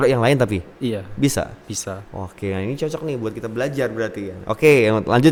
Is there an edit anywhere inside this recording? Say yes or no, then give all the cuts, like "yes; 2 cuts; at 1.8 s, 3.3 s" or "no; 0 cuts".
no; 0 cuts